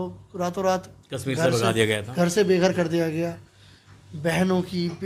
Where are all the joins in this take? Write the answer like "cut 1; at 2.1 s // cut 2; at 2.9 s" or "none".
none